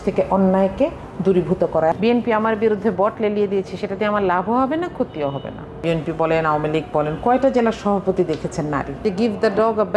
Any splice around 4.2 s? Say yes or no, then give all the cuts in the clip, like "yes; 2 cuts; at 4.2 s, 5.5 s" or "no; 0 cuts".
no; 3 cuts; at 2.0 s, 5.8 s, 9.0 s